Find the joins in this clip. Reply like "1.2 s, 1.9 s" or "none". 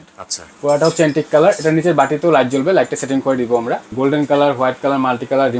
3.9 s